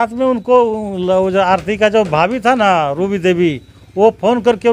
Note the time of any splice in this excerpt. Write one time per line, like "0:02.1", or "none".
none

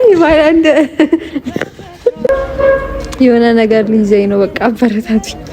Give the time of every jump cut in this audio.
0:02.3

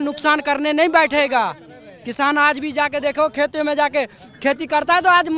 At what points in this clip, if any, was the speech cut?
none

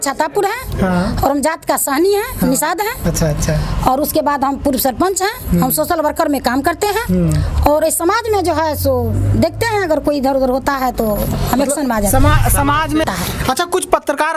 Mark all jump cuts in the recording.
0:13.0

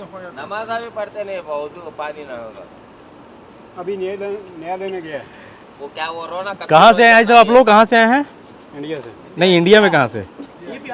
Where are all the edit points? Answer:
none

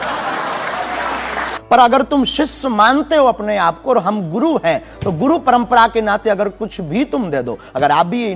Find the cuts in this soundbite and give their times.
0:01.5

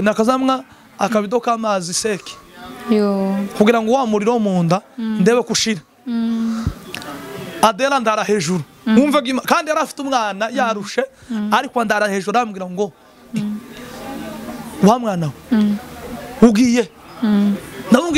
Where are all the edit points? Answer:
none

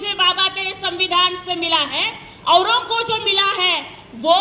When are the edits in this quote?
none

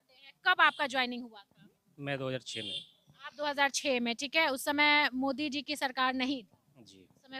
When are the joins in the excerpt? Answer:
none

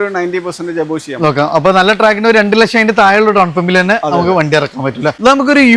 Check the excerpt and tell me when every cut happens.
none

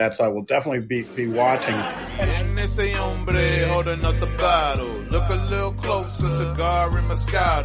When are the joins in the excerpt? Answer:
0:02.3

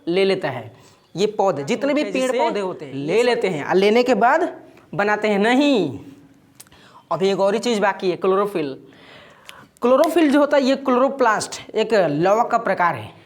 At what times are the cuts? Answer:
0:02.9

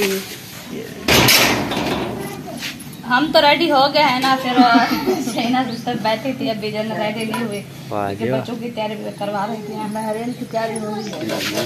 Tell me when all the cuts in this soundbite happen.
none

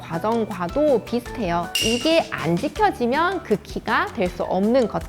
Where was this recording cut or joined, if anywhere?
0:01.7

